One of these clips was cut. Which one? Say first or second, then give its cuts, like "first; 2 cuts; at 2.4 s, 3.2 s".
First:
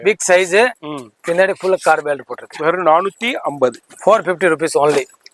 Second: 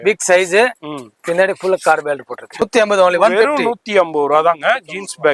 second; 1 cut; at 2.5 s